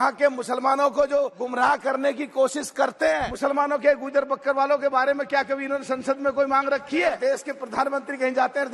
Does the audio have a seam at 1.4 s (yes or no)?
yes